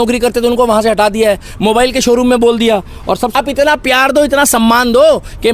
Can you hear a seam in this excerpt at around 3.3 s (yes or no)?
yes